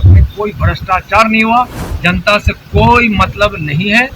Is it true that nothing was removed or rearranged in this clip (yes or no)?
no